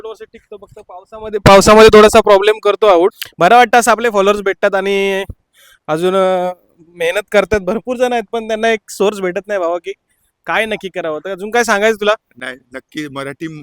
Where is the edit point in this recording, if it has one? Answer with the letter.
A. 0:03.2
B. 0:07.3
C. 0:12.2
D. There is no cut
A